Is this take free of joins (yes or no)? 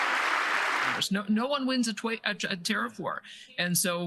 no